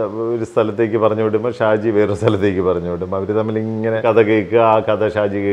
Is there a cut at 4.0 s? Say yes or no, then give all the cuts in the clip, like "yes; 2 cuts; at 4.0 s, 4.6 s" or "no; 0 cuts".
yes; 1 cut; at 4.0 s